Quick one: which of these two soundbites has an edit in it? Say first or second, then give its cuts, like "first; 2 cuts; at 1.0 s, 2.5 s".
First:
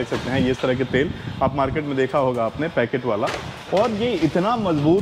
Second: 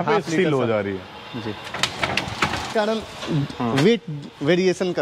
second; 1 cut; at 2.7 s